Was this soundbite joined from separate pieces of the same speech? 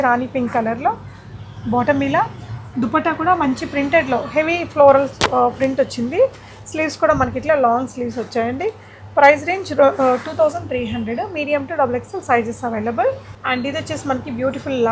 no; 0 cuts

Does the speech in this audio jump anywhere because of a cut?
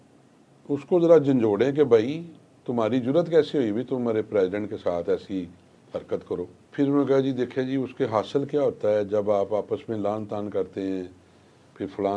yes; 1 cut; at 6.6 s

